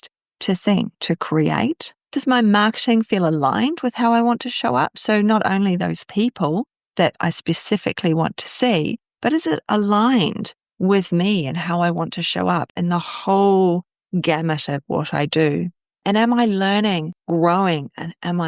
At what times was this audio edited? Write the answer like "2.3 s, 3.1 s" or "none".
none